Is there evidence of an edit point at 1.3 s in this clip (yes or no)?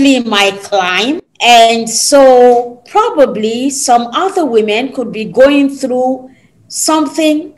yes